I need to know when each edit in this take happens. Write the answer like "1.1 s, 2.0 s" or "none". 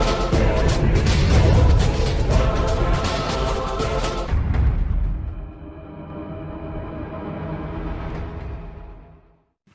none